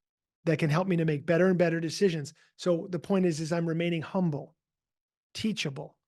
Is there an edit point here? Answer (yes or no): no